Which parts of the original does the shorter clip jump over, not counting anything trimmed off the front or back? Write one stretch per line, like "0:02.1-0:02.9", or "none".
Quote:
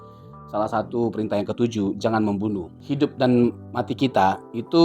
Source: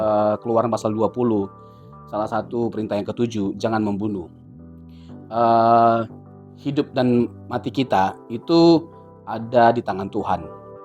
0:04.3-0:06.5